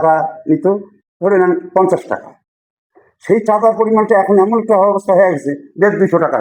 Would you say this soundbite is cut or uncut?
uncut